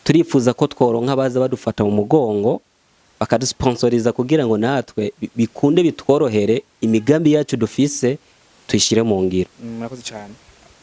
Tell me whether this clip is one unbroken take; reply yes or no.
yes